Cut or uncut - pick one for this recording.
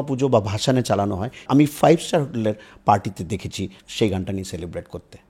cut